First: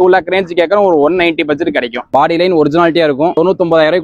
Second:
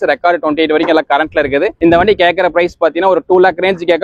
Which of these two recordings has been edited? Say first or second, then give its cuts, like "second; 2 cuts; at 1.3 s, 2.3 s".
first; 1 cut; at 2.1 s